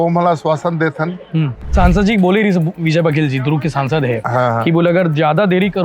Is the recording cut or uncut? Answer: cut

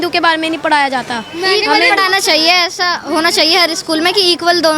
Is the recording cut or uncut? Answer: uncut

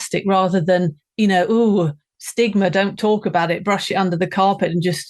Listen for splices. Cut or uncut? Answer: cut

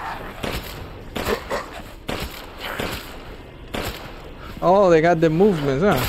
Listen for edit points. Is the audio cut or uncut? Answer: uncut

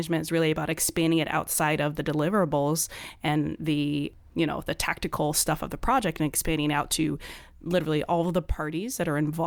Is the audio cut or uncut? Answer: uncut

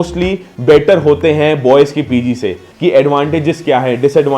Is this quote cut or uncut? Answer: cut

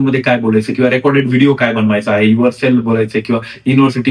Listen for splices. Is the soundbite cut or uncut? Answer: uncut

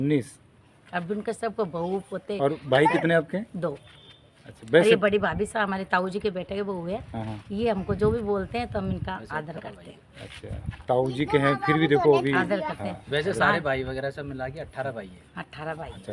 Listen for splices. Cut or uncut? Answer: uncut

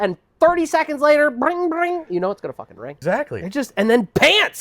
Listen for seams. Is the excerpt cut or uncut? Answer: cut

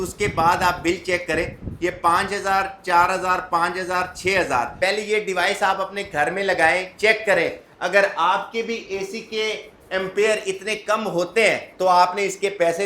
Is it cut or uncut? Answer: cut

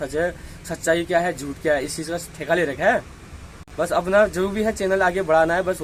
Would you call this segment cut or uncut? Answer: uncut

